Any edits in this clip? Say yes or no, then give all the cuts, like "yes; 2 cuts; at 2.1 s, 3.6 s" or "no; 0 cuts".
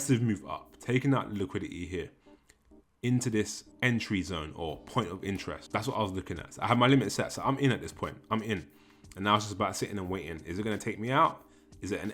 yes; 2 cuts; at 3.6 s, 5.6 s